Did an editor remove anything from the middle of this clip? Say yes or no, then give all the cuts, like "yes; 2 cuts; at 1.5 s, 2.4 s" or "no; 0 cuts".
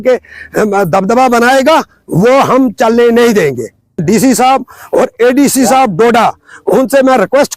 yes; 1 cut; at 4.0 s